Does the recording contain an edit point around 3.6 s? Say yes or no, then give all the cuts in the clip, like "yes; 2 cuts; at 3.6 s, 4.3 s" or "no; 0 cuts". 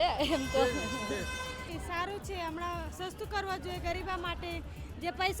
no; 1 cut; at 1.7 s